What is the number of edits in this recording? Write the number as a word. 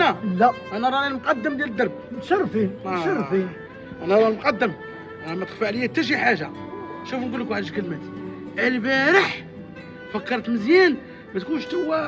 zero